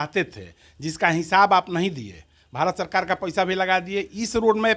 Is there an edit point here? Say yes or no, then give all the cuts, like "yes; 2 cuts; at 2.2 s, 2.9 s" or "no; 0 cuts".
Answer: no; 0 cuts